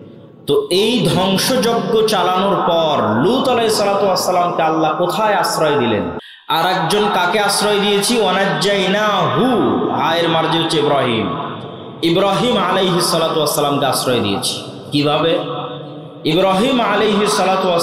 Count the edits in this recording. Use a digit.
1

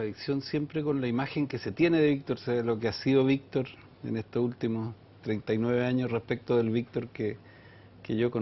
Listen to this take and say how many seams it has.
1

